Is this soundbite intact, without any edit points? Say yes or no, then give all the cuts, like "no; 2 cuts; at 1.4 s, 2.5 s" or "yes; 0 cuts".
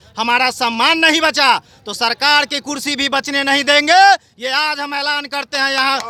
yes; 0 cuts